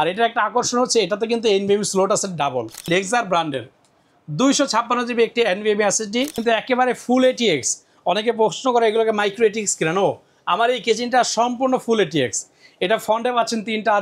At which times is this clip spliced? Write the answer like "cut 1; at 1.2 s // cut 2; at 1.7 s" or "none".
cut 1; at 2.9 s // cut 2; at 6.4 s

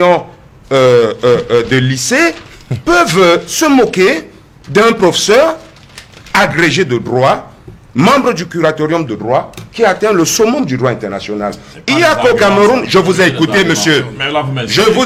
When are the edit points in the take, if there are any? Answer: none

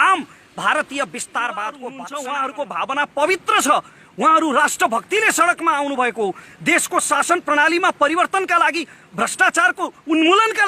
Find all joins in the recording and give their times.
cut 1; at 1.8 s

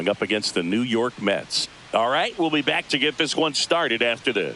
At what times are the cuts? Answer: cut 1; at 1.9 s

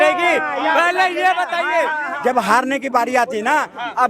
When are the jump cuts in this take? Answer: cut 1; at 2.1 s

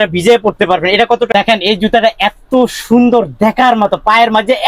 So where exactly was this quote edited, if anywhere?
cut 1; at 1.3 s

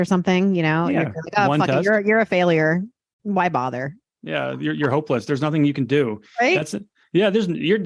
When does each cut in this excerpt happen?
cut 1; at 4.1 s

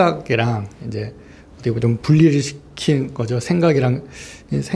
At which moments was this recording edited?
none

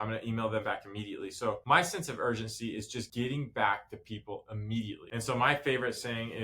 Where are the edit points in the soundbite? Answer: cut 1; at 5.0 s

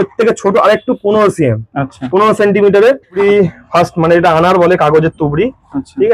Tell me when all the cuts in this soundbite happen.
cut 1; at 3.2 s

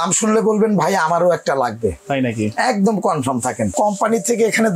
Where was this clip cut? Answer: cut 1; at 3.7 s

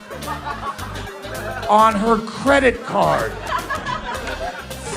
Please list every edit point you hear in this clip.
cut 1; at 1.2 s

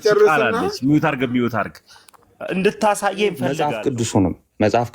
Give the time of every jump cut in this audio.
cut 1; at 3.6 s

